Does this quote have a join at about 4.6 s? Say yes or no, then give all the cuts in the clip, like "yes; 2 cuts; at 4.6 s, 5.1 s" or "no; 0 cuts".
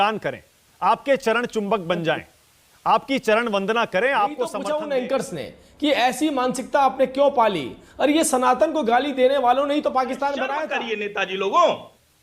yes; 2 cuts; at 4.6 s, 10.6 s